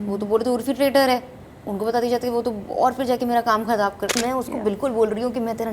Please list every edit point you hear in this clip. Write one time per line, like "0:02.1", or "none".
0:04.1